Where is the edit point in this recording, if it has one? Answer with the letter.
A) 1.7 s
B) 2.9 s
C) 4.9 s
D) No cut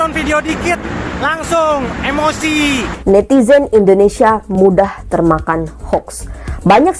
B